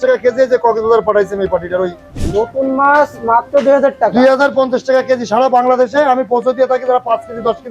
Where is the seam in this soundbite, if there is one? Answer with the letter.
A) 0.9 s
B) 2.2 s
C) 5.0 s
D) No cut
B